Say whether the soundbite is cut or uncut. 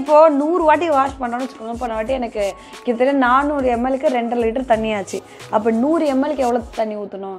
uncut